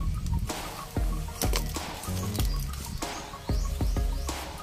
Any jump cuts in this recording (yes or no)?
no